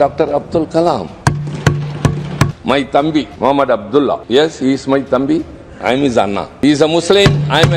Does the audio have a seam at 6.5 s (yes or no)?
yes